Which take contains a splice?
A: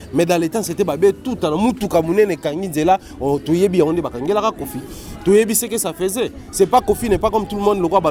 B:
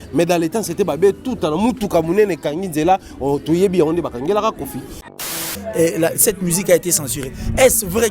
B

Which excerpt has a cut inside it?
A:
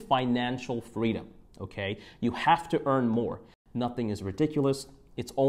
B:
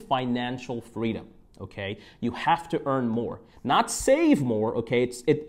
A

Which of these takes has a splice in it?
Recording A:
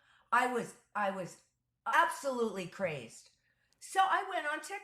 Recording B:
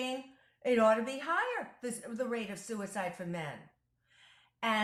A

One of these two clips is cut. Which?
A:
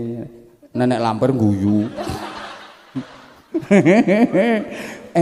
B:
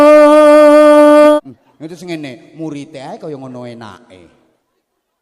B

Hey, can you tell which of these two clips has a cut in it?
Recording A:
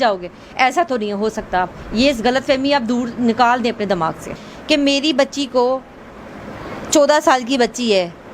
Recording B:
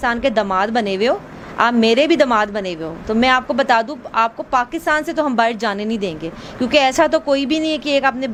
A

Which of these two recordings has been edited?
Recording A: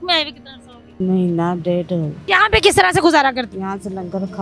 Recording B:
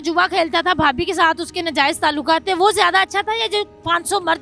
A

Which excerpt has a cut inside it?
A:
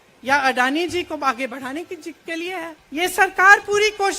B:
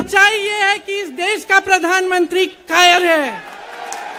A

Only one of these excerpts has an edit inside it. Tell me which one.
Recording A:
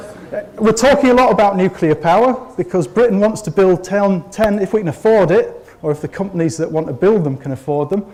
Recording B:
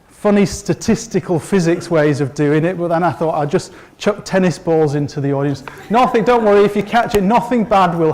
B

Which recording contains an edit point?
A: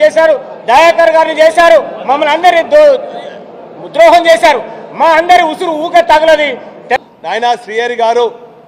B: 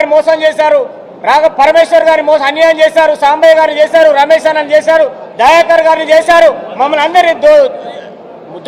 A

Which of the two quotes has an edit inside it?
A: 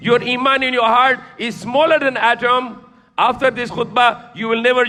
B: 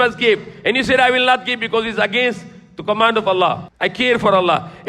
B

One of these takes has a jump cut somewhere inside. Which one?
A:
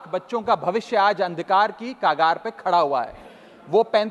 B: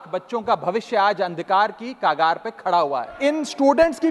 B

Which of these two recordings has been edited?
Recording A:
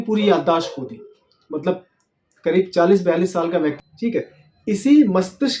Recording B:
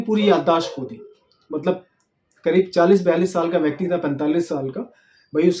A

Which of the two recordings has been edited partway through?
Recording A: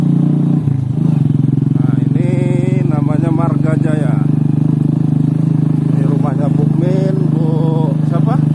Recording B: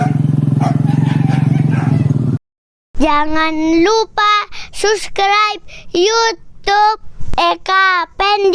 B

